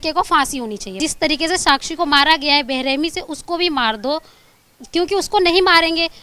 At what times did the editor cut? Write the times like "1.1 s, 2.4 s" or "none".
1.0 s